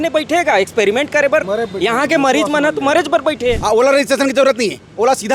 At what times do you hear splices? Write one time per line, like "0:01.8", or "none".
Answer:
0:03.6